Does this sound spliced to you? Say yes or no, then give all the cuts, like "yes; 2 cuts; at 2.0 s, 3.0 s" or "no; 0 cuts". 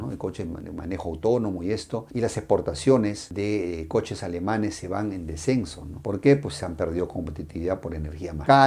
no; 0 cuts